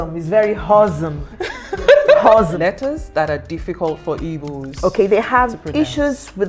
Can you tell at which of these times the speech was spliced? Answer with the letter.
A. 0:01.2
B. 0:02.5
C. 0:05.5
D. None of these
B